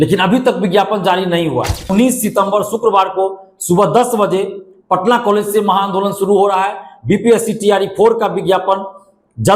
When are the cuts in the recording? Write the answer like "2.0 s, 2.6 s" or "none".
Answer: 1.8 s

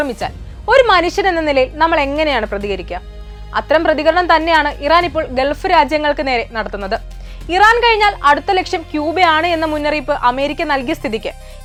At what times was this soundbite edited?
none

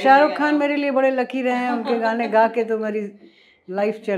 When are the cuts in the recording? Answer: none

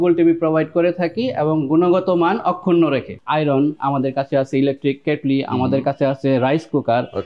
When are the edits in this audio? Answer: 3.1 s

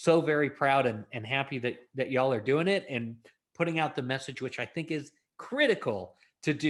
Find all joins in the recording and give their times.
none

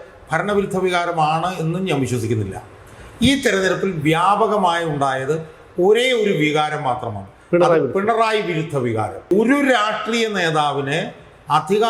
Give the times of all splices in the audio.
9.3 s

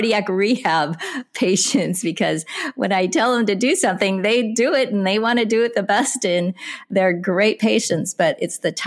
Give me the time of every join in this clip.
none

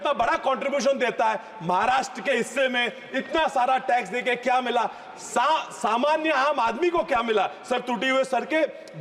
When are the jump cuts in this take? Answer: none

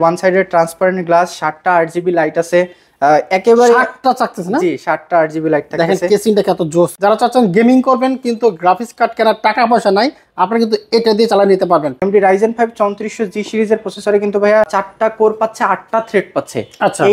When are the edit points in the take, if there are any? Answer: 6.9 s, 12.0 s, 14.7 s

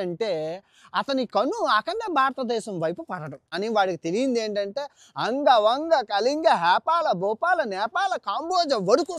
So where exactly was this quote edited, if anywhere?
3.4 s

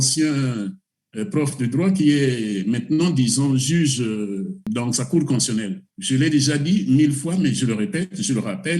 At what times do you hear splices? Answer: 4.7 s, 5.9 s

